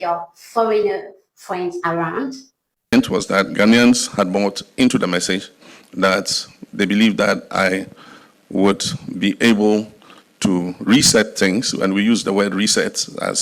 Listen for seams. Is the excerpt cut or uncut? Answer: cut